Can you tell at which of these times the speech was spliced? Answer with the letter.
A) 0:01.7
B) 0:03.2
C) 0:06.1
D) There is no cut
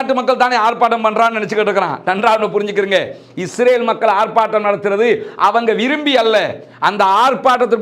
D